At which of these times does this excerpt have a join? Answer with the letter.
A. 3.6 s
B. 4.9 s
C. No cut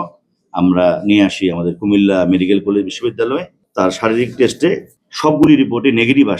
A